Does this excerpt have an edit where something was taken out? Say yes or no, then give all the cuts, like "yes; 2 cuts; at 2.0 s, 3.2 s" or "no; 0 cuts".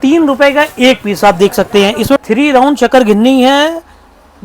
yes; 1 cut; at 2.2 s